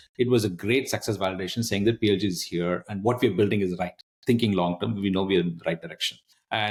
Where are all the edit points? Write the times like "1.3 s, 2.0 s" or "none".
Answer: none